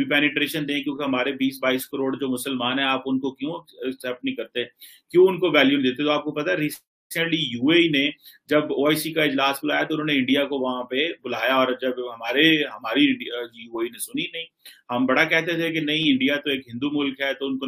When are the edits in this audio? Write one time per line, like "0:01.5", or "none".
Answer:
none

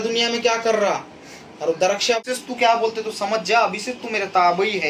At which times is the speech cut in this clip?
0:02.2

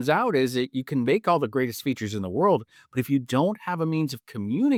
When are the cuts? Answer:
none

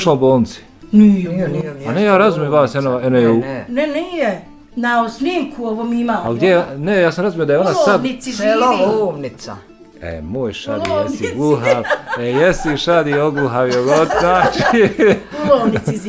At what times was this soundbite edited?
none

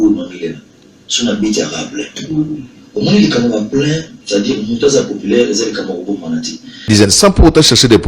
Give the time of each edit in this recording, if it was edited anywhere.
0:06.9

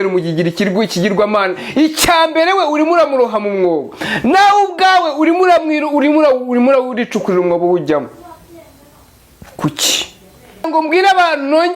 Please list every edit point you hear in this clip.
0:10.7

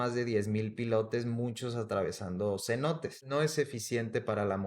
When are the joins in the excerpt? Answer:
0:03.2

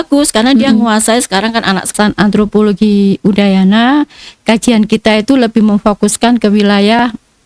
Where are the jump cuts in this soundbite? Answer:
0:01.9

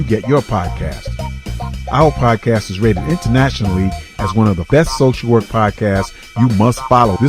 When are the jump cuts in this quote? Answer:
0:04.7

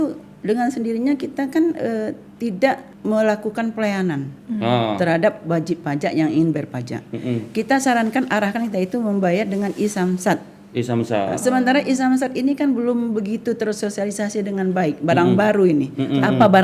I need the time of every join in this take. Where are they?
none

